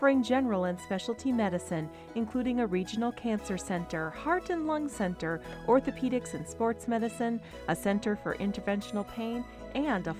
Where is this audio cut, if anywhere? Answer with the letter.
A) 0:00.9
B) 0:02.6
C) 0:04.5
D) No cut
D